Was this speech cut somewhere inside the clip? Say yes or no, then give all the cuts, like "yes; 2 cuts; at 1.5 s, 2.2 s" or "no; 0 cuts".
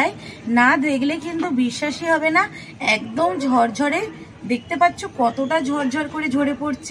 no; 0 cuts